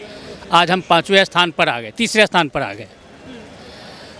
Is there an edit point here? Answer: no; 0 cuts

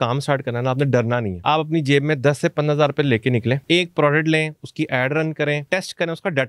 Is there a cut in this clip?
yes; 3 cuts; at 1.3 s, 3.6 s, 5.6 s

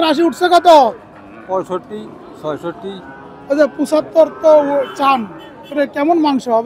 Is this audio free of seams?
yes; 0 cuts

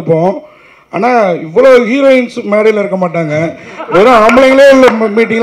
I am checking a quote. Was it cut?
no; 0 cuts

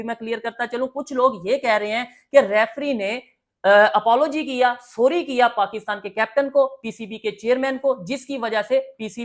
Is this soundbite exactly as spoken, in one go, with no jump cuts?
yes; 0 cuts

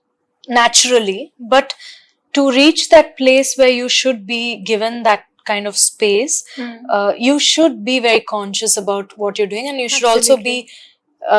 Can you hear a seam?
no; 0 cuts

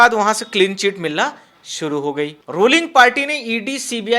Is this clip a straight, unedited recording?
no; 1 cut; at 2.4 s

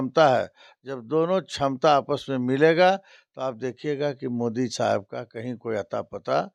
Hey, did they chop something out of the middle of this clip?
no; 0 cuts

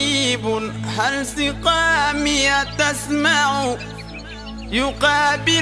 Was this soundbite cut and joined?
no; 0 cuts

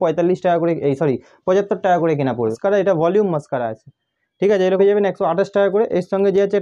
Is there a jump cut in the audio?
yes; 2 cuts; at 2.6 s, 4.8 s

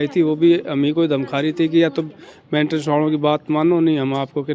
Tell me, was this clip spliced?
no; 0 cuts

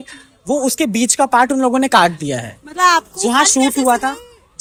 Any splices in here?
no; 0 cuts

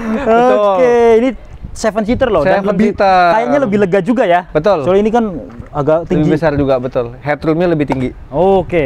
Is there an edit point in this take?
no; 0 cuts

